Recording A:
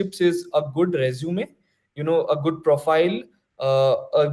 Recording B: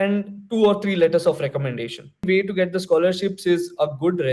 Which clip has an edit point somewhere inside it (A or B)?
B